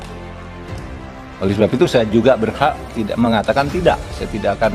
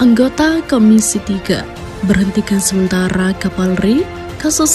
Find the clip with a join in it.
first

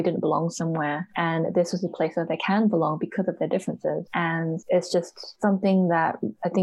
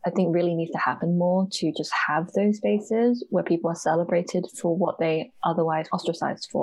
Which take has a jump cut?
first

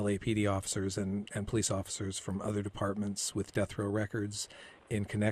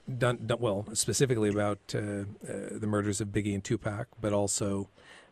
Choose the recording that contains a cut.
second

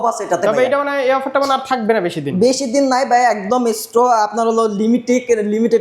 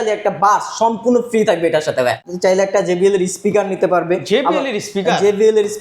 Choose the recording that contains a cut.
second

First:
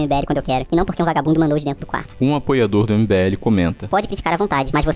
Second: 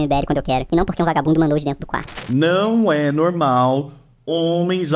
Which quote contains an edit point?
second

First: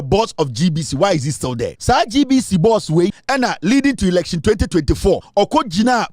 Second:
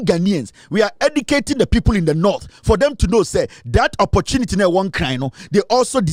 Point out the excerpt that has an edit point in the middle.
first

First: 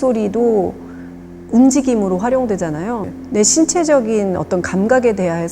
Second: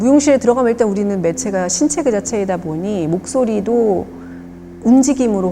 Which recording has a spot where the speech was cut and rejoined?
first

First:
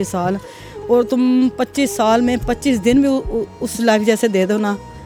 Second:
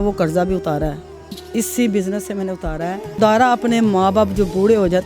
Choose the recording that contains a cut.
second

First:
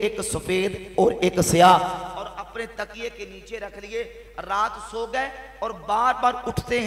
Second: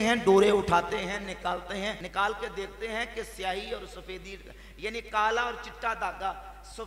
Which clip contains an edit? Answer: second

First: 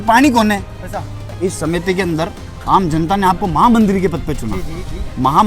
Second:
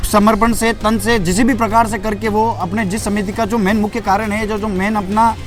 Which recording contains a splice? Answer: first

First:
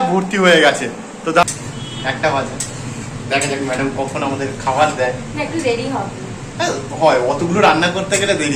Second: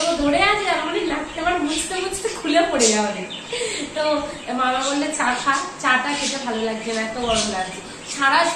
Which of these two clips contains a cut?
first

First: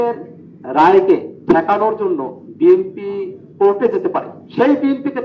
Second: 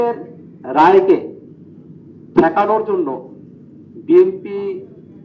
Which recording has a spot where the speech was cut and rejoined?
first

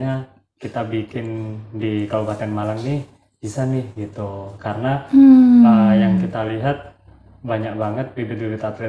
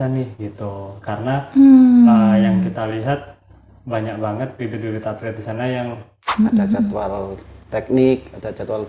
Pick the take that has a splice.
second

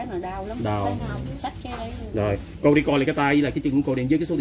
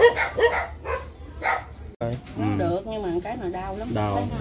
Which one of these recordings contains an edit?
second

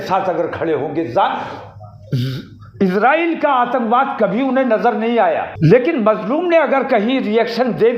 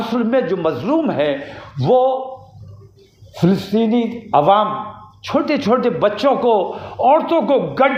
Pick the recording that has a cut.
first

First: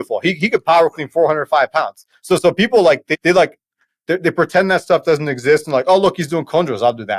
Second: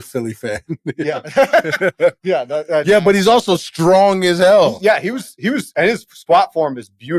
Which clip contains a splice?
first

